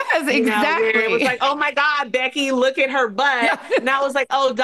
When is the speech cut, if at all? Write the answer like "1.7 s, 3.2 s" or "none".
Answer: none